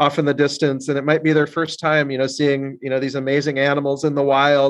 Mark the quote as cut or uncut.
uncut